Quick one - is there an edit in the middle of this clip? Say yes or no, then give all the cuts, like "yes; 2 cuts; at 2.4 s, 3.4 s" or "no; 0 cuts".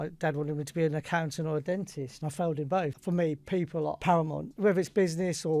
yes; 2 cuts; at 2.9 s, 4.1 s